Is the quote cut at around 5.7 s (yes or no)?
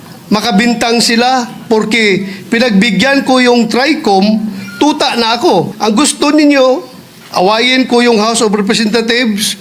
yes